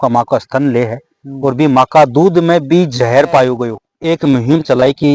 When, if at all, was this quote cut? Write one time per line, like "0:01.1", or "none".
0:03.7